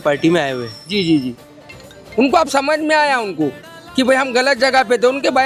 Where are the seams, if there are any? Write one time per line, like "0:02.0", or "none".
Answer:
none